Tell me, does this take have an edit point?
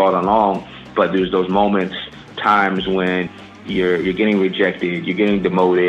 yes; 3 cuts; at 0.9 s, 2.3 s, 3.5 s

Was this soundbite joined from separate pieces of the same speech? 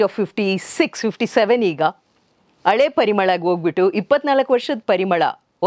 no; 0 cuts

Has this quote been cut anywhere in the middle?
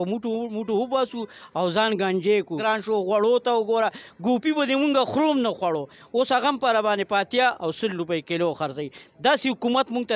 yes; 1 cut; at 2.6 s

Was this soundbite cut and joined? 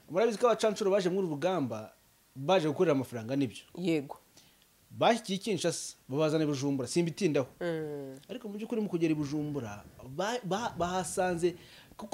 no; 0 cuts

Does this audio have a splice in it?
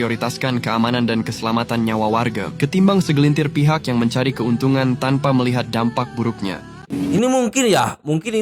yes; 1 cut; at 6.9 s

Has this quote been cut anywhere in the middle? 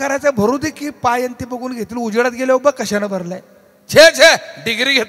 no; 0 cuts

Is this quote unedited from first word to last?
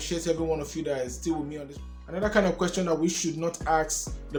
yes; 0 cuts

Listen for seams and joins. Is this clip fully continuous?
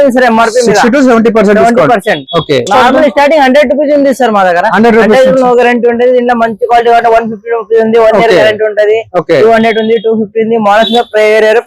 yes; 0 cuts

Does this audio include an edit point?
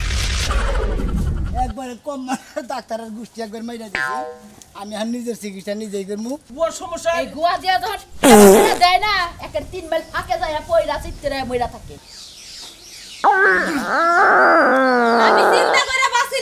yes; 2 cuts; at 6.5 s, 11.9 s

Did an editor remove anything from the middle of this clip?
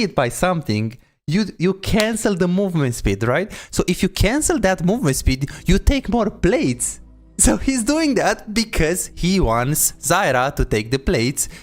no; 0 cuts

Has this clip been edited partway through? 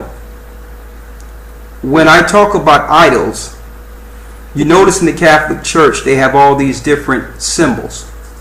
yes; 1 cut; at 1.5 s

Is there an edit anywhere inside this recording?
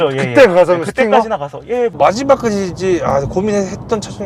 yes; 1 cut; at 1.9 s

